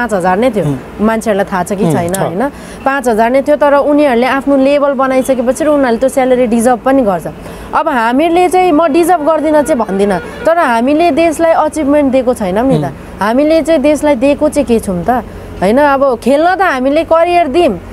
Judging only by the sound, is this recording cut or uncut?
uncut